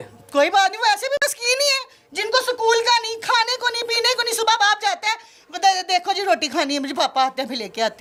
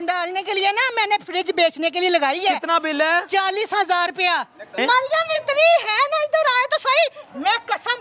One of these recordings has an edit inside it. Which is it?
second; 1 cut; at 4.8 s

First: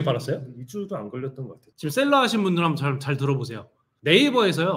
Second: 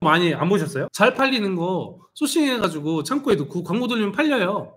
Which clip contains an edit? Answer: first; 1 cut; at 1.7 s

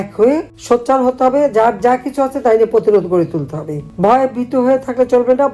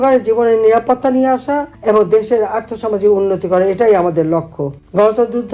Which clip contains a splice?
second; 1 cut; at 1.7 s

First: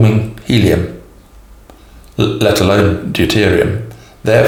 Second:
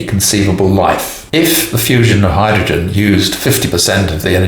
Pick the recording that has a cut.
second; 1 cut; at 1.1 s

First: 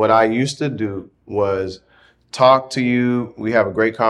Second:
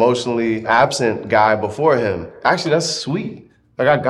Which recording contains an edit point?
second; 1 cut; at 2.3 s

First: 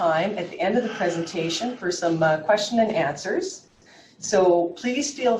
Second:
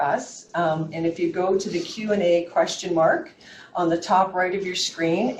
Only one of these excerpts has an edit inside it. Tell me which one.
second; 1 cut; at 1.5 s

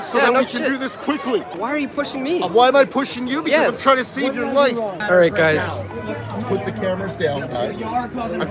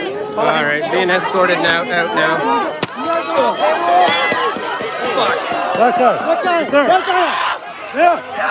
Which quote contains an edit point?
first; 2 cuts; at 1.6 s, 5.0 s

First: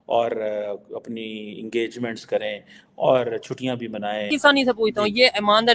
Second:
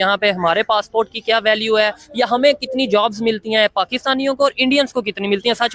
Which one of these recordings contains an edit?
first; 1 cut; at 4.3 s

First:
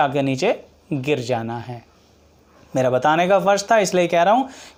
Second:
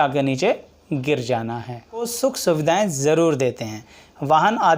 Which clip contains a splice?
second; 1 cut; at 2.1 s

